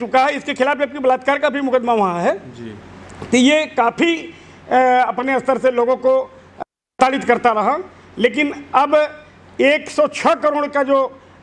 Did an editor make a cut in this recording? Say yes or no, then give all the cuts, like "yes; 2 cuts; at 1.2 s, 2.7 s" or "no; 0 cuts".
no; 0 cuts